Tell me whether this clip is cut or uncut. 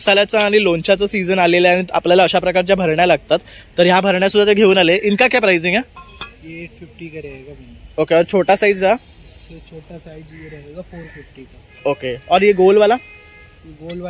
uncut